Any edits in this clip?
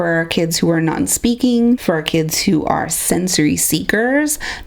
yes; 1 cut; at 1.8 s

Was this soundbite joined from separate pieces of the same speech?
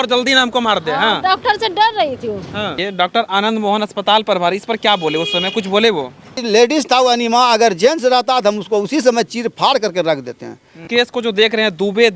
yes; 3 cuts; at 2.8 s, 6.4 s, 10.8 s

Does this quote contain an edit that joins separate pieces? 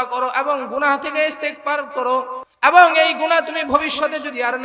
yes; 1 cut; at 2.4 s

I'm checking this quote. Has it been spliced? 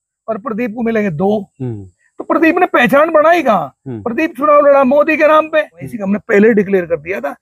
yes; 1 cut; at 5.9 s

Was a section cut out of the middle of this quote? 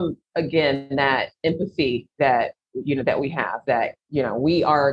yes; 1 cut; at 4.0 s

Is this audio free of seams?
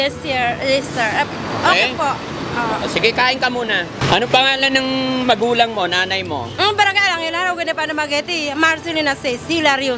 no; 1 cut; at 4.0 s

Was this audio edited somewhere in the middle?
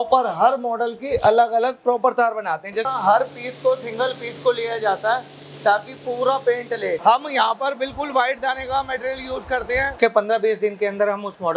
yes; 3 cuts; at 2.9 s, 7.0 s, 10.0 s

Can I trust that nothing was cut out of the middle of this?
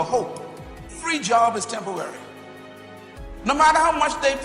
no; 1 cut; at 1.1 s

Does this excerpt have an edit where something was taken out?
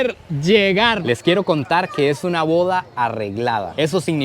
yes; 1 cut; at 1.0 s

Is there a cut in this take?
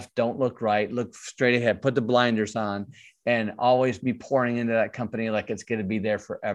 no; 0 cuts

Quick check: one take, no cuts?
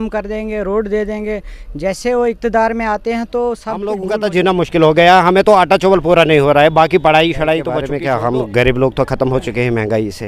no; 2 cuts; at 4.0 s, 7.9 s

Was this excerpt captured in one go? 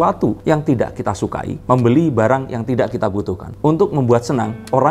yes; 0 cuts

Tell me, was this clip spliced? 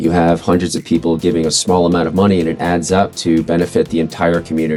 no; 0 cuts

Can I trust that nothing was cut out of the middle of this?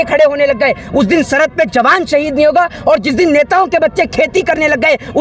yes; 0 cuts

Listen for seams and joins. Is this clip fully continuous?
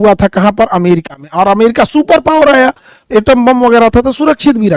yes; 0 cuts

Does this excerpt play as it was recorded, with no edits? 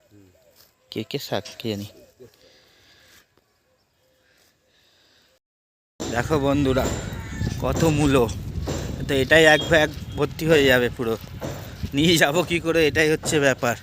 no; 1 cut; at 5.4 s

